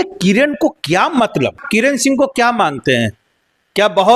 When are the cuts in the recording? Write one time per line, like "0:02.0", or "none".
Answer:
0:01.6